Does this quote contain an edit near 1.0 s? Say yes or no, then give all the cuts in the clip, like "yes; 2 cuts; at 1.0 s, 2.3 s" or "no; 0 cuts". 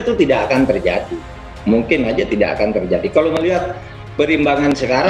no; 0 cuts